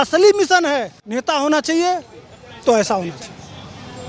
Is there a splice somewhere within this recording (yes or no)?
yes